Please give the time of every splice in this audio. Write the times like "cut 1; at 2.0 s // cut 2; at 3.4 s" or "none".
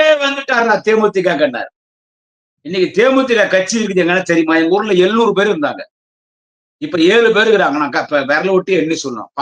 none